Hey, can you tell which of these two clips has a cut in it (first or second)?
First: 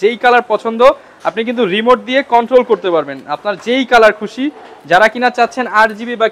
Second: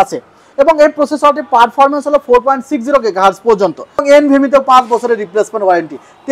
second